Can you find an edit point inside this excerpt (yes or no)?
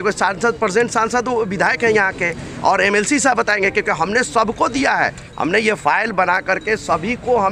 no